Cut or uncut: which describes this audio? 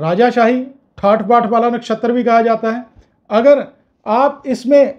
uncut